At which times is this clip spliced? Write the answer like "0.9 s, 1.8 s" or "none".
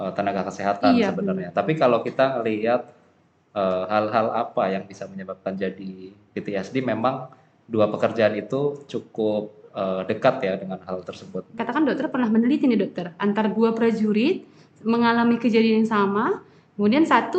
11.6 s